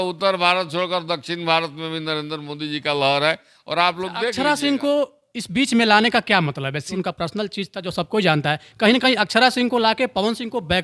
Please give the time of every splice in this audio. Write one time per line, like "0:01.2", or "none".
0:04.3
0:06.9